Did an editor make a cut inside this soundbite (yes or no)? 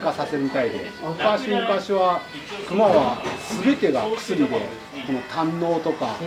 no